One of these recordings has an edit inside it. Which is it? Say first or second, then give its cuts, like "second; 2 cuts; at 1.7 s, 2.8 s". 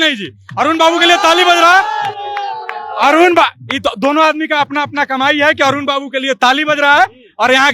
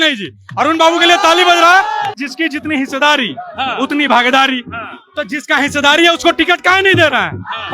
second; 1 cut; at 2.2 s